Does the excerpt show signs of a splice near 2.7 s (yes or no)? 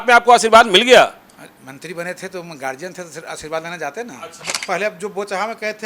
no